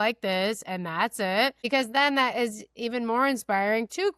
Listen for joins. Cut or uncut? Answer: cut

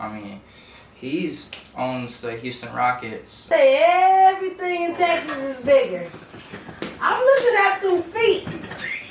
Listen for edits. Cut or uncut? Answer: cut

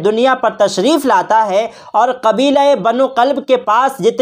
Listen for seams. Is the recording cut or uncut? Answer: uncut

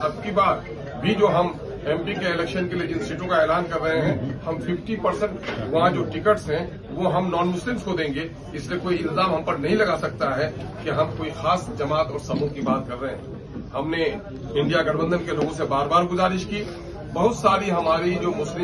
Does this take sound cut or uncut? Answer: uncut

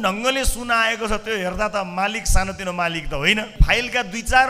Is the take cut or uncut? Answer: cut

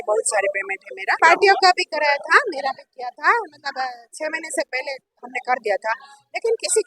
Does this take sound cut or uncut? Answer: cut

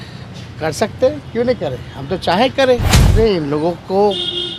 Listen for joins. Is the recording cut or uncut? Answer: cut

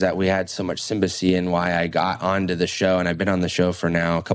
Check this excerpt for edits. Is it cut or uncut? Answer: uncut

